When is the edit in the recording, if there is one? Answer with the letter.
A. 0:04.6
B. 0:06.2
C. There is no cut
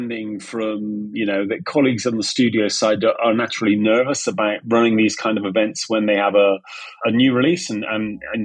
A